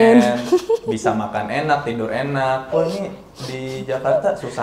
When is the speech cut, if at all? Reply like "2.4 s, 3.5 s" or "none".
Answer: none